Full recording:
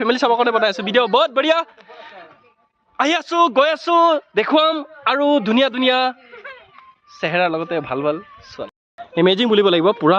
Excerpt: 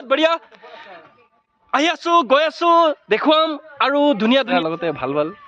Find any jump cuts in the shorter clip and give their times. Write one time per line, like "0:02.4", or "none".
0:04.5